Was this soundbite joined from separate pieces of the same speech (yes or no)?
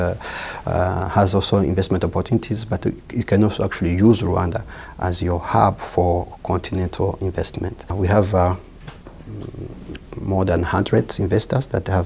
no